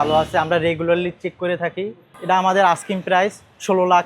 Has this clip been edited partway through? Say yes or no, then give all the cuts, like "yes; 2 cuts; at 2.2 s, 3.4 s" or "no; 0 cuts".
yes; 1 cut; at 2.1 s